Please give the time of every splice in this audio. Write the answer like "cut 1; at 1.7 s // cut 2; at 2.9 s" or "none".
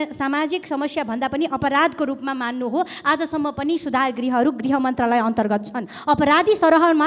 none